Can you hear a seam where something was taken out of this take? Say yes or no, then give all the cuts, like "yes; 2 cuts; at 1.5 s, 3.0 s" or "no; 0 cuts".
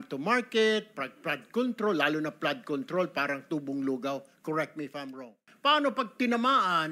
yes; 1 cut; at 5.4 s